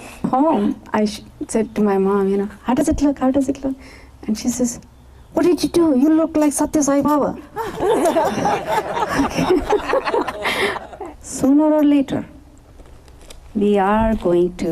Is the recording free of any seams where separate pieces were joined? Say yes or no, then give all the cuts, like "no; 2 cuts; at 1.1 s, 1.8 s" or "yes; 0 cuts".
no; 1 cut; at 10.8 s